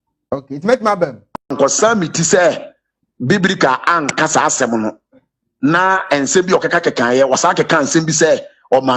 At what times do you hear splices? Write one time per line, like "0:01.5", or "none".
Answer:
0:01.5